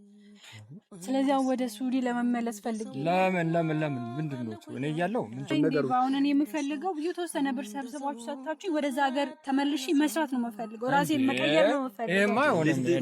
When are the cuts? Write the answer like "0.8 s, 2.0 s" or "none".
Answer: 5.5 s

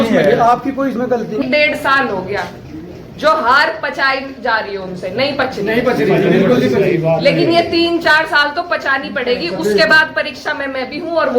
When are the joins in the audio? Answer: 1.4 s

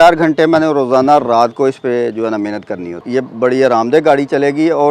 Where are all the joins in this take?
3.0 s

